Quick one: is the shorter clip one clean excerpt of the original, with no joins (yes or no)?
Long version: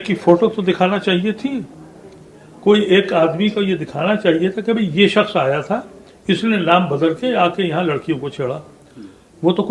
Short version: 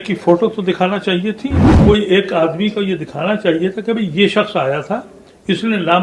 no